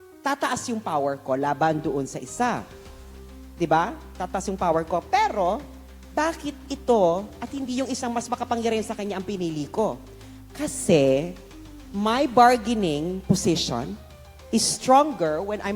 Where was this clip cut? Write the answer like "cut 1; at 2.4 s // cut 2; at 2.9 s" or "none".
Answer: none